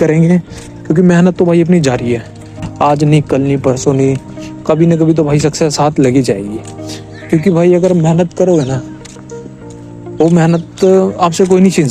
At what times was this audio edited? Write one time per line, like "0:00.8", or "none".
none